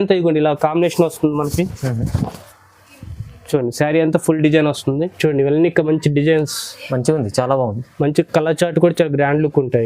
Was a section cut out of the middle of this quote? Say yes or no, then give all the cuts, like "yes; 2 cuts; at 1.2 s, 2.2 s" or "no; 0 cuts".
yes; 1 cut; at 5.1 s